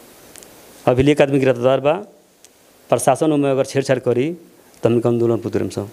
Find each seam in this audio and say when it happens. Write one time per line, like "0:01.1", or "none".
none